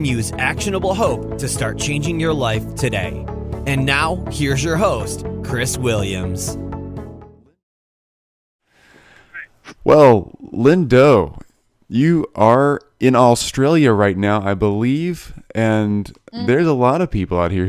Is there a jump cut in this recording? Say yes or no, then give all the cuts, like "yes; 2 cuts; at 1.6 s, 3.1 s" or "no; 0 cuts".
yes; 1 cut; at 11.4 s